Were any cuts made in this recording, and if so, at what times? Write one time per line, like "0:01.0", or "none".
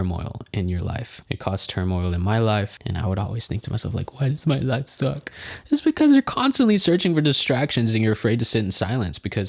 0:01.1

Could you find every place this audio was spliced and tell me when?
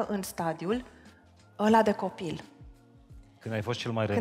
none

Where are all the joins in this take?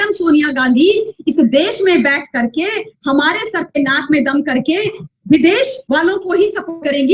0:05.8

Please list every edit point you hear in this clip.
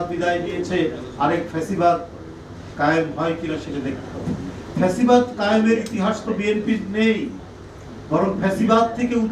none

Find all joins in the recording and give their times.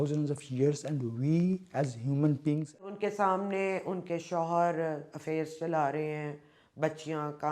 0:02.9

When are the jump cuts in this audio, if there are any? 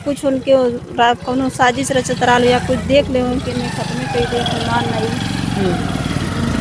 none

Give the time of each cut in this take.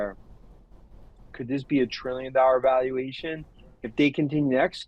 0:01.3

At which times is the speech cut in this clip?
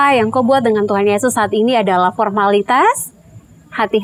none

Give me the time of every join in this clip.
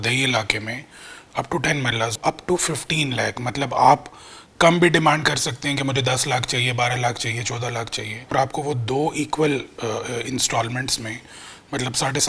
0:02.2
0:08.3

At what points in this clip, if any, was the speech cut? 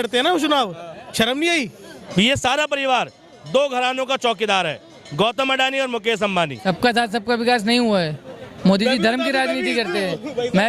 0:01.9
0:06.6

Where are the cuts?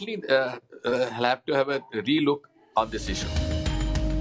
0:03.2

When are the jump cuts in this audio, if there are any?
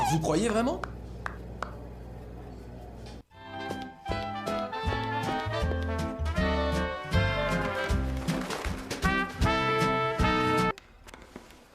0:03.1
0:10.7

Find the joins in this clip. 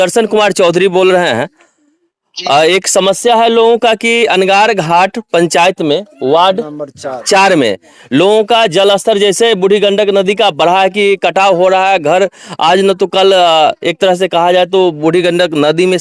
none

